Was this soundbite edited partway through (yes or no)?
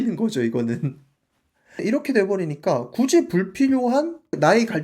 yes